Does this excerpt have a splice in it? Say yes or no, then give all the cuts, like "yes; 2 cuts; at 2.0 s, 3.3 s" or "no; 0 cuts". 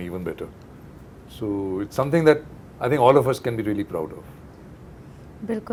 no; 0 cuts